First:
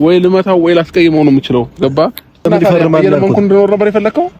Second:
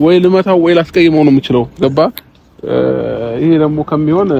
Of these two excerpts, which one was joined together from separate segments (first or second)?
first